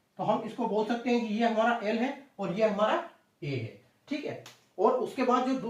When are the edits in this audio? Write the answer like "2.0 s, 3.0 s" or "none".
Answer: none